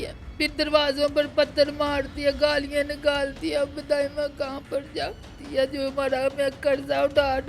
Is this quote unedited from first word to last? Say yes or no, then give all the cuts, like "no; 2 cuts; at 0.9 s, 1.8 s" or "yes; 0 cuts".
no; 1 cut; at 5.3 s